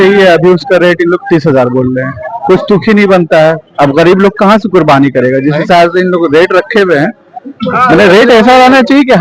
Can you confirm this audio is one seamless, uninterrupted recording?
yes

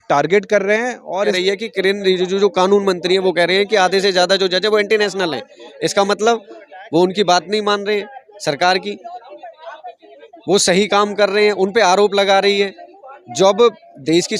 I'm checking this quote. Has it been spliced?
yes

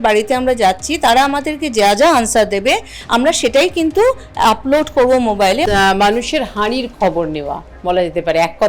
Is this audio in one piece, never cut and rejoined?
no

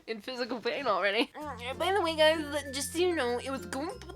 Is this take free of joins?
no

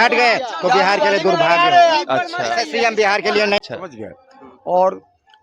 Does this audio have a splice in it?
yes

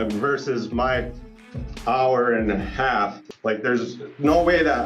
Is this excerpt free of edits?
no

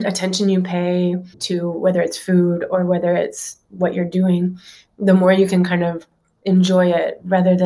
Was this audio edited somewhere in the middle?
no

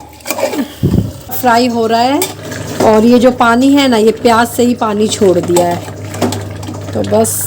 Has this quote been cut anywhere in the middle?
yes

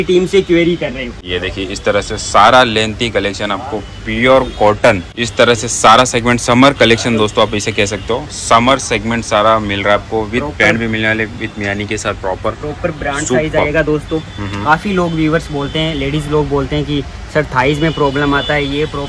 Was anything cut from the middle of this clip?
yes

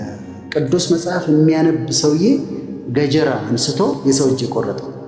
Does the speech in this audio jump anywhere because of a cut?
yes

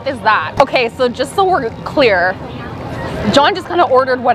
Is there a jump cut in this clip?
no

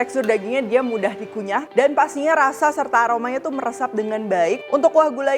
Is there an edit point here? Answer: yes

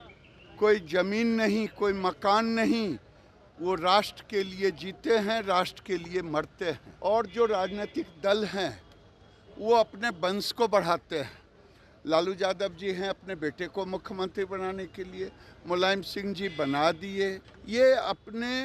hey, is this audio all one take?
no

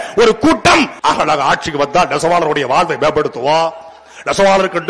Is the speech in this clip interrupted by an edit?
yes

